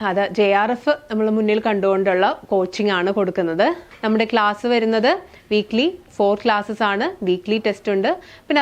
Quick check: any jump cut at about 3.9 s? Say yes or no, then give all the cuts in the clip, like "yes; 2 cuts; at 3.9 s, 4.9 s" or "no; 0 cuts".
yes; 1 cut; at 3.9 s